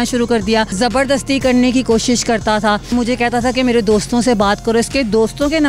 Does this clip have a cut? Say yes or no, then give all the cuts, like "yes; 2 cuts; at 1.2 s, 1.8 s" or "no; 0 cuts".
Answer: yes; 2 cuts; at 0.7 s, 2.9 s